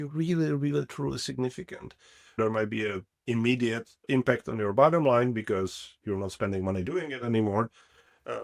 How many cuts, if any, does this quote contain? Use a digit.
2